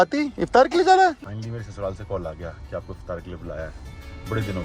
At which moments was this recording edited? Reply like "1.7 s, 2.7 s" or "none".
1.2 s